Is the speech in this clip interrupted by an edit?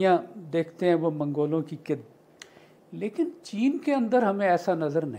yes; 1 cut; at 2.2 s

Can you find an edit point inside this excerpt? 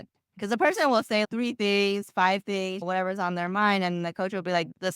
yes; 2 cuts; at 1.2 s, 2.8 s

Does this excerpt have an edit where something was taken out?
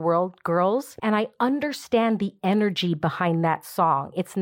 yes; 1 cut; at 0.9 s

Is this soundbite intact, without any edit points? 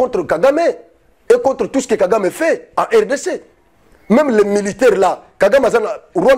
yes; 0 cuts

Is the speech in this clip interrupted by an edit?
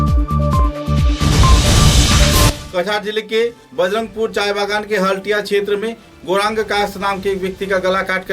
yes; 1 cut; at 2.5 s

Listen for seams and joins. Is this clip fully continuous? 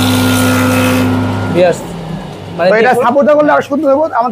no; 1 cut; at 1.5 s

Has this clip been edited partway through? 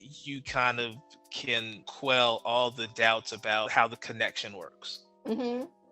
yes; 2 cuts; at 1.8 s, 3.7 s

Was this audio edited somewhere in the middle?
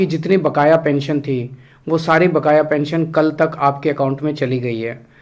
no; 0 cuts

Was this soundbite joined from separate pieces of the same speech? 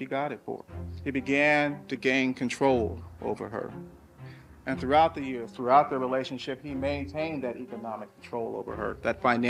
no; 0 cuts

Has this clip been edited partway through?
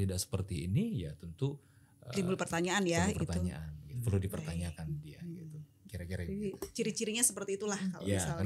no; 0 cuts

